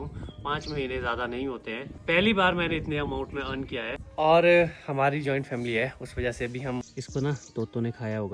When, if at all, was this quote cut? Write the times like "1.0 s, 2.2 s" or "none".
1.9 s, 4.0 s, 6.8 s